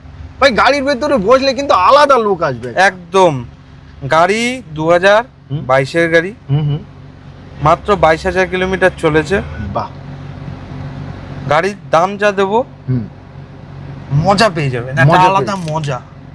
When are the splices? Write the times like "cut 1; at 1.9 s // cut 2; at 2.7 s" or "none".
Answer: none